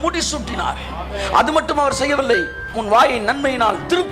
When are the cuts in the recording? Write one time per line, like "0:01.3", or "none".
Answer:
0:02.7